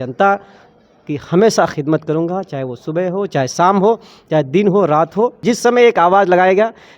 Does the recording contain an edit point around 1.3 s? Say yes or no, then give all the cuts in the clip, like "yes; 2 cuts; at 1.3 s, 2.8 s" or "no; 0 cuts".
no; 1 cut; at 5.4 s